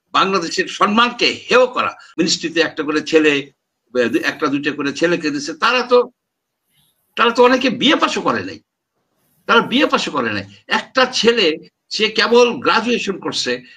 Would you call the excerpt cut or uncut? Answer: cut